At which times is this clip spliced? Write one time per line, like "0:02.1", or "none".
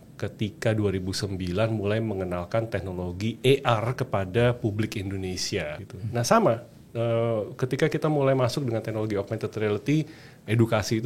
0:05.8